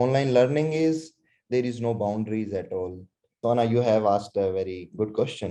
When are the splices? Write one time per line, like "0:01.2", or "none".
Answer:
0:03.3